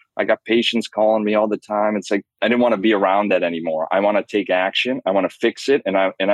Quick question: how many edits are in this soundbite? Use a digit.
1